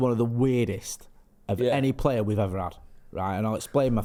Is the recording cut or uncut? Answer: uncut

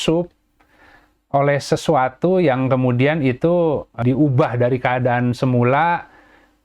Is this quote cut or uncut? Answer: cut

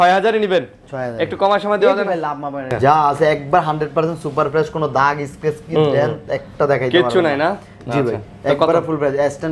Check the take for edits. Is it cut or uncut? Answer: cut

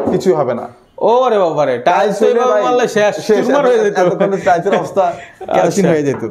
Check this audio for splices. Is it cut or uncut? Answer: uncut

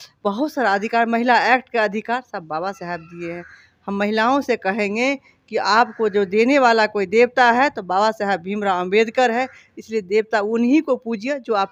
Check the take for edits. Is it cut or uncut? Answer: uncut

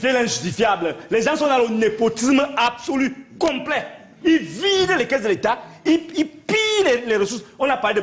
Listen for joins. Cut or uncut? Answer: uncut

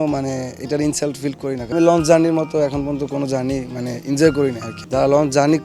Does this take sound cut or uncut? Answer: cut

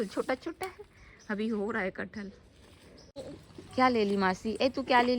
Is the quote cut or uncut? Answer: cut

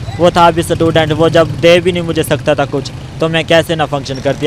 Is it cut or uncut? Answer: uncut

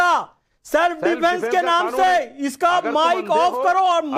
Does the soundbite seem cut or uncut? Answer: uncut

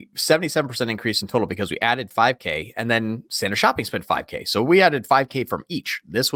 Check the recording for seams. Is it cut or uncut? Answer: uncut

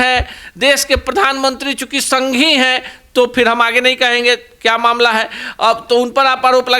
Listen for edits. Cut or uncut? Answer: uncut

